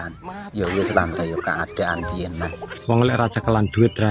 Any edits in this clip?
yes; 1 cut; at 2.7 s

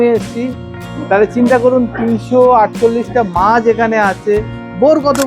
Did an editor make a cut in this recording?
no; 0 cuts

